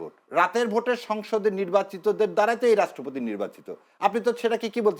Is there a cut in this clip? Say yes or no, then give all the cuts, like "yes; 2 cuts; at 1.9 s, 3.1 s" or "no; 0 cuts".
no; 0 cuts